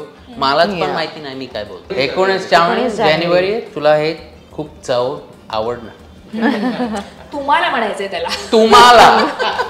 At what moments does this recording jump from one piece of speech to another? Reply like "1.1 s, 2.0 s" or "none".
1.9 s